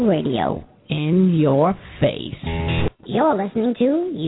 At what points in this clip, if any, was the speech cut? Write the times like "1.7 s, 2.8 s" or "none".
2.9 s